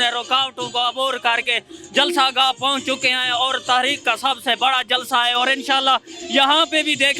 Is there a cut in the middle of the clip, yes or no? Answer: no